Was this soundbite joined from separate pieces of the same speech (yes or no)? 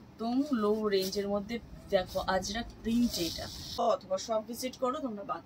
yes